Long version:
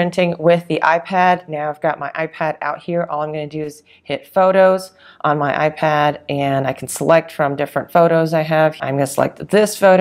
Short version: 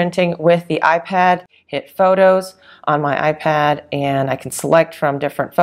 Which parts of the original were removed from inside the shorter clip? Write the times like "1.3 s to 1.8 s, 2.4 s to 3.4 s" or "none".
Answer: 1.5 s to 3.9 s